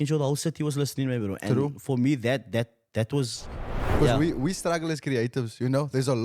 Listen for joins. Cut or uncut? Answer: cut